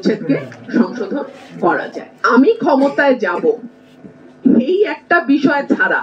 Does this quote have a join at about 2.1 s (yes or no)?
yes